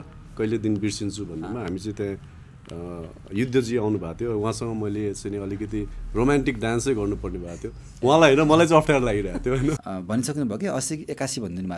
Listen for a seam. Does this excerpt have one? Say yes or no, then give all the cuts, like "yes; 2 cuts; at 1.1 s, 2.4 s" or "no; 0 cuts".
yes; 1 cut; at 9.8 s